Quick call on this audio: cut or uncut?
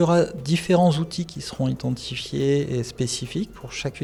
uncut